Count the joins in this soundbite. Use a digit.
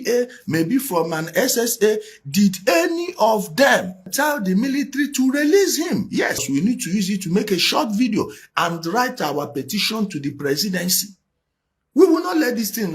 2